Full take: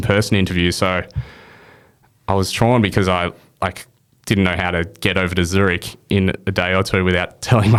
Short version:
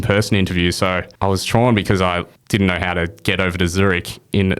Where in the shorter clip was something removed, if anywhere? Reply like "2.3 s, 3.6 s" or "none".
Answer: 1.1 s, 2.3 s